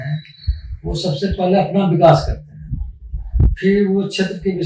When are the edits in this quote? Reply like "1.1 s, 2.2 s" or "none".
none